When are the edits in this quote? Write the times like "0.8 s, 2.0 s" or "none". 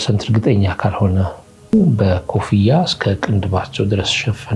1.7 s